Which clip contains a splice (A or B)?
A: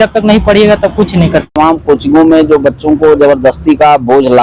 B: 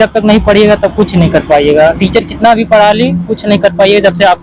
A